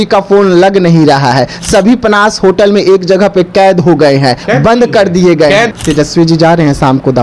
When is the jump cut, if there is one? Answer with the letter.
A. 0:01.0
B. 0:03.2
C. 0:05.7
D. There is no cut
C